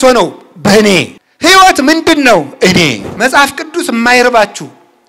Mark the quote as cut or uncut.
cut